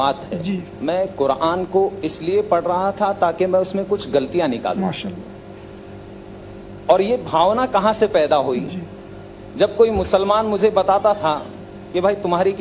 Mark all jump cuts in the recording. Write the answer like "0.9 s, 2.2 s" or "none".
none